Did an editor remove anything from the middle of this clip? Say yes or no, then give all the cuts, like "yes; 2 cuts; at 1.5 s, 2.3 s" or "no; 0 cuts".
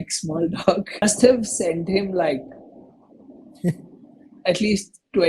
yes; 1 cut; at 1.0 s